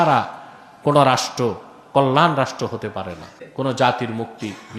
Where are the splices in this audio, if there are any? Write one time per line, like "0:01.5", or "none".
0:03.4